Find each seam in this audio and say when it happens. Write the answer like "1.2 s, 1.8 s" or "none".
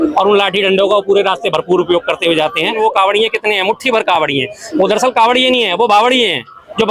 2.8 s